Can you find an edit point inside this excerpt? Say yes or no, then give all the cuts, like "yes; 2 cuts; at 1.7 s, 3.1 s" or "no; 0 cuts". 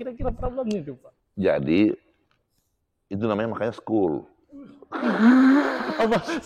no; 0 cuts